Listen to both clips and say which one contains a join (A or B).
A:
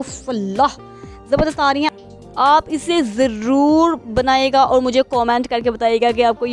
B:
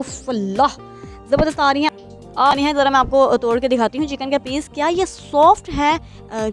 B